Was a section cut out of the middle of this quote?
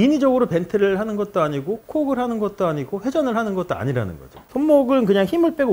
yes; 1 cut; at 4.4 s

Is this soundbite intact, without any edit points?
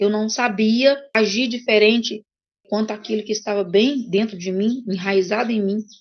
no; 2 cuts; at 1.1 s, 2.6 s

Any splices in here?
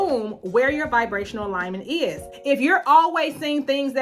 yes; 1 cut; at 2.3 s

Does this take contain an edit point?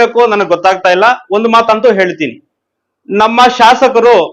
no; 0 cuts

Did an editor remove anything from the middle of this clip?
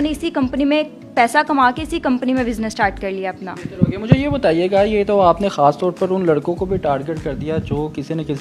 no; 0 cuts

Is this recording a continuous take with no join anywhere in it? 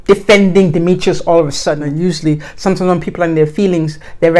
no; 1 cut; at 1.9 s

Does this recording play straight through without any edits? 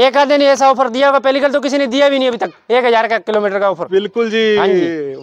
yes; 0 cuts

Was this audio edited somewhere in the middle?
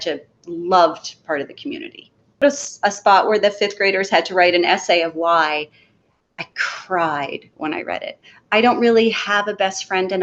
yes; 1 cut; at 2.4 s

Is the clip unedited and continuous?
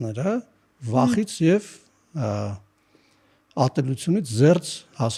yes; 0 cuts

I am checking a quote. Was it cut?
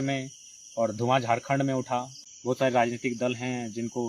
yes; 1 cut; at 2.2 s

